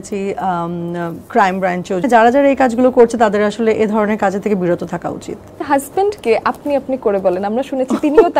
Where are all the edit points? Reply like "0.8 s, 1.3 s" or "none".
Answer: 2.1 s, 5.5 s